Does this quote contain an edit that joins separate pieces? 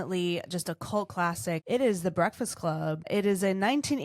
yes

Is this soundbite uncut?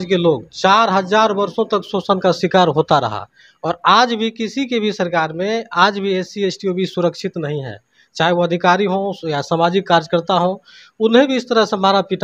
yes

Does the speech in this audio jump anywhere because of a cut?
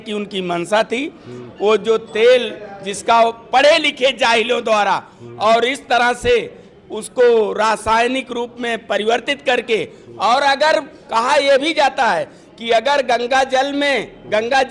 no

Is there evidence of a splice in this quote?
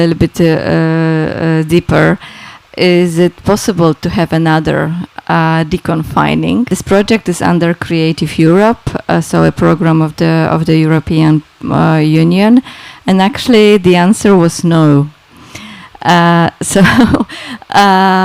yes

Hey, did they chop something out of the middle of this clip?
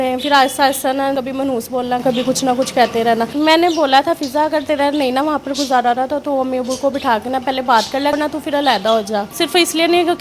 yes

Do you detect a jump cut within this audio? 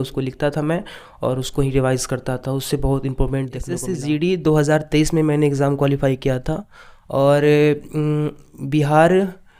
yes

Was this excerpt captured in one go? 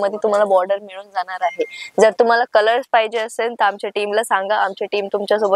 yes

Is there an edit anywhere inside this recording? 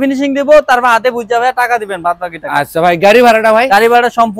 no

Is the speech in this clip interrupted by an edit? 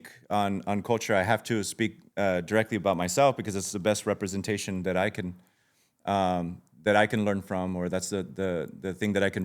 no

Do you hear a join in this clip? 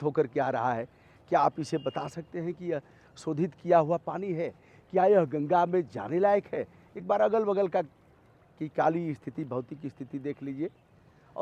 no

